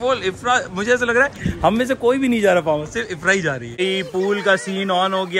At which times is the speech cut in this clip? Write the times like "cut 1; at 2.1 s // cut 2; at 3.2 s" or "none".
cut 1; at 3.7 s

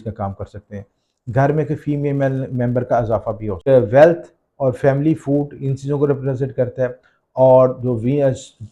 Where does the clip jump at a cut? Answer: cut 1; at 3.6 s

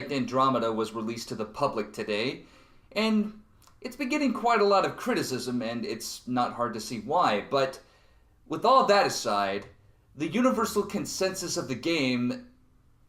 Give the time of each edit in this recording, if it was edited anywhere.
cut 1; at 12.1 s

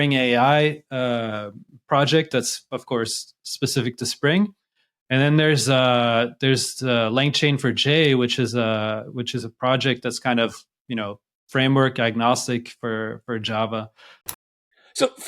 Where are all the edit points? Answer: cut 1; at 14.3 s

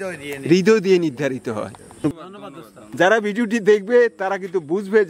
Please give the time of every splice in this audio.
cut 1; at 2.2 s

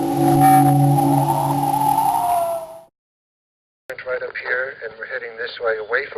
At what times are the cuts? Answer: cut 1; at 1.6 s

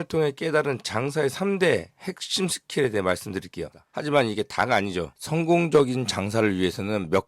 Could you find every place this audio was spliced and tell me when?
cut 1; at 3.8 s

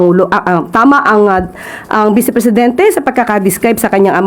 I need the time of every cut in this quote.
none

